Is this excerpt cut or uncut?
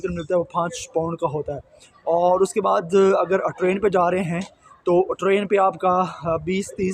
uncut